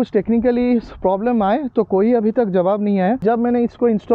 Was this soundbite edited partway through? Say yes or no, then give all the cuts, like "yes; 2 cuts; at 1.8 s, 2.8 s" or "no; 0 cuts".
yes; 1 cut; at 3.2 s